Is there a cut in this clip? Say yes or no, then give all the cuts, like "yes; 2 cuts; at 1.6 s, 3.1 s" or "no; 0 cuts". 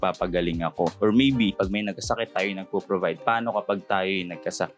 no; 0 cuts